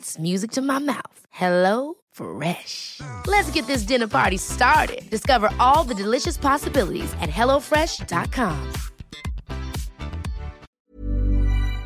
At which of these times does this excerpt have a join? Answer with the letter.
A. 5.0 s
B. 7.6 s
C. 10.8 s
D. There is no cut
C